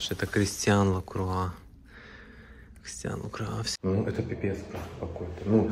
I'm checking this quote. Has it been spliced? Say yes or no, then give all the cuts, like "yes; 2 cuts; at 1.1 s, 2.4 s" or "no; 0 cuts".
yes; 1 cut; at 3.7 s